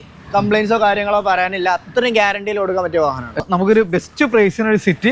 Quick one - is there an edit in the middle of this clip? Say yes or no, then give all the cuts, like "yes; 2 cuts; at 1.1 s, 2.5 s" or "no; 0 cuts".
yes; 1 cut; at 3.4 s